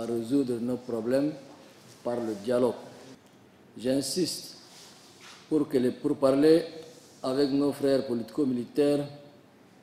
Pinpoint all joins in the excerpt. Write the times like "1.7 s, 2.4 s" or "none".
2.9 s